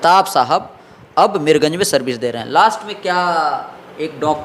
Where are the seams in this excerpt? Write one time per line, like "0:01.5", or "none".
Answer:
none